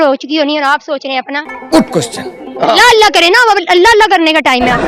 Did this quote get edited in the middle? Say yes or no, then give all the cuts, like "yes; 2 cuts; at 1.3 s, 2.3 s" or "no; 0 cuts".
no; 0 cuts